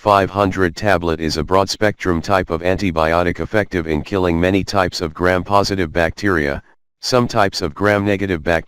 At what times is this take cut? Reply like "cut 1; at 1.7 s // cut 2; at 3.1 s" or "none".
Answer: cut 1; at 1.0 s